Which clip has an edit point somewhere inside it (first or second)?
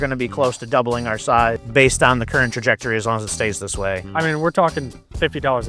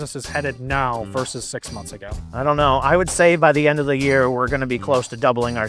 first